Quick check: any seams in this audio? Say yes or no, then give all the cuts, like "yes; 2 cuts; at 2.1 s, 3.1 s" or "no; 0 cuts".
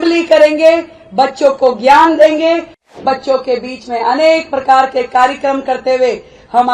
yes; 1 cut; at 3.0 s